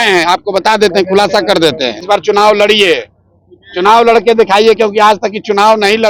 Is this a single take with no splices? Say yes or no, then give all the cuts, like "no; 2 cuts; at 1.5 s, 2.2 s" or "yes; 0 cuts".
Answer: no; 1 cut; at 2.0 s